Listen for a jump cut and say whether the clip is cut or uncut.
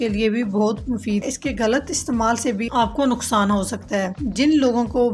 cut